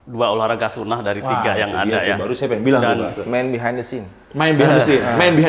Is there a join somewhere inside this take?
yes; 1 cut; at 3.1 s

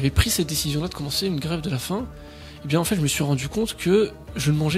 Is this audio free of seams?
yes; 0 cuts

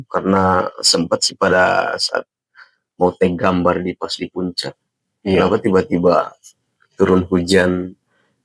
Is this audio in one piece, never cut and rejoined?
yes; 0 cuts

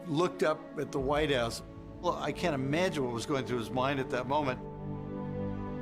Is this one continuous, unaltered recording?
yes; 0 cuts

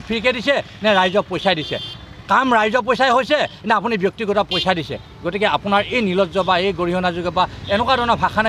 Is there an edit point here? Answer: no; 0 cuts

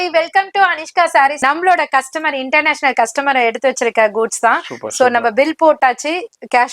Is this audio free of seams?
no; 1 cut; at 1.4 s

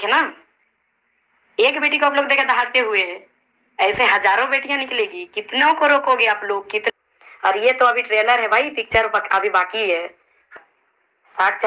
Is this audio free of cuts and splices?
no; 2 cuts; at 6.9 s, 10.5 s

